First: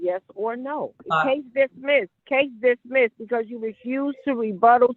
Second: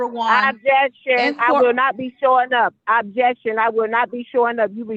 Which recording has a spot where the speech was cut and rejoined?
first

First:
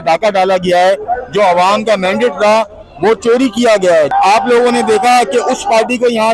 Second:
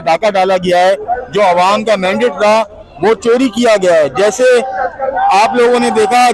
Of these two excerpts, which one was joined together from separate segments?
first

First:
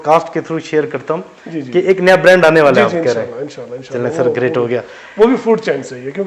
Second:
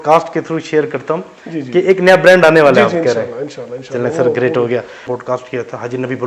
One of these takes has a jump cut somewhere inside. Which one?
second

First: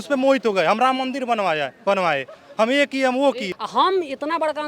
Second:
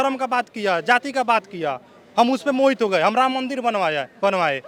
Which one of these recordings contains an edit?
first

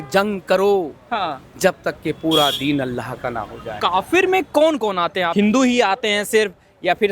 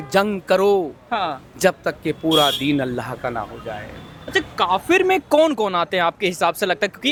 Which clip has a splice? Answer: first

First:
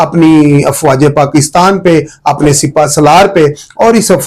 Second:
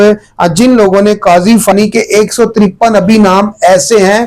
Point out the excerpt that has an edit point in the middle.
second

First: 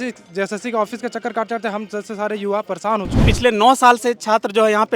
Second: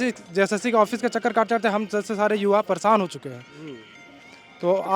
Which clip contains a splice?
first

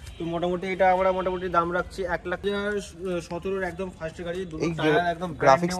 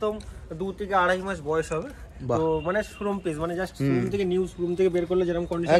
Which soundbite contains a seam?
first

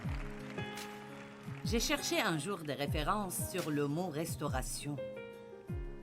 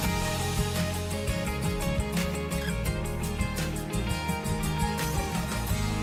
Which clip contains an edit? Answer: first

